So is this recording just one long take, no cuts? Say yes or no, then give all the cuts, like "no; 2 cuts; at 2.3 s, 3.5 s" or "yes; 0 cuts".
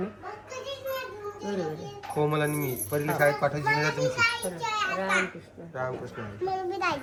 yes; 0 cuts